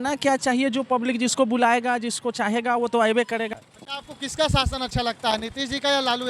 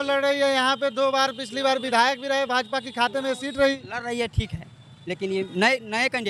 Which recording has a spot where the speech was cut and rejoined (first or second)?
first